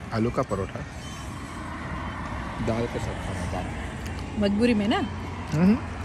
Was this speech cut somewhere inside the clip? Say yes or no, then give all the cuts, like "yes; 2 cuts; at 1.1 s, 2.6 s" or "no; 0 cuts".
no; 0 cuts